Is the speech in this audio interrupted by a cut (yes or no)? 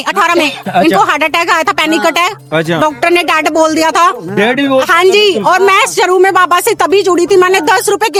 no